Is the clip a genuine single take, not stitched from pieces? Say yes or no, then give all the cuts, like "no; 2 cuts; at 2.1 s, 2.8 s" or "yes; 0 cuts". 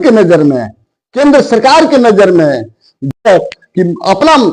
no; 1 cut; at 3.2 s